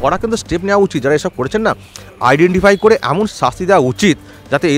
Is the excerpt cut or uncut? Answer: uncut